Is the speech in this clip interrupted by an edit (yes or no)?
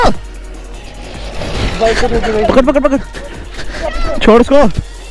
no